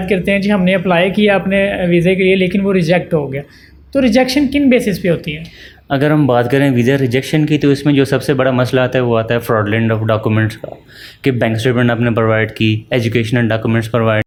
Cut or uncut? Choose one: uncut